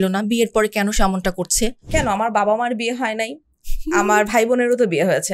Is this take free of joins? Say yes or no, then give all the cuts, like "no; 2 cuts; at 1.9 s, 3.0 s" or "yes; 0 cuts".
no; 1 cut; at 1.9 s